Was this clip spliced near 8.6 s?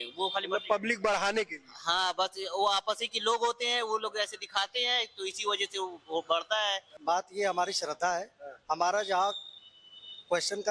no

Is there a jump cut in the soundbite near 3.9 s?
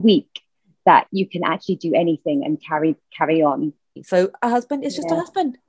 yes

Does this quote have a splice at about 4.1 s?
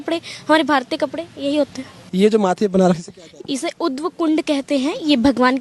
no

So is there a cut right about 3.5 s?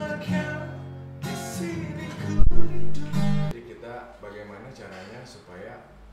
yes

